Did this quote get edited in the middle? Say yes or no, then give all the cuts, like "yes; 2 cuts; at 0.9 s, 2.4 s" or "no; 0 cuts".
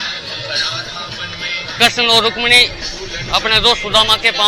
no; 0 cuts